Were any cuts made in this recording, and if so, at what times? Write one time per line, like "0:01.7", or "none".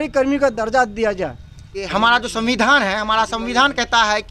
0:01.9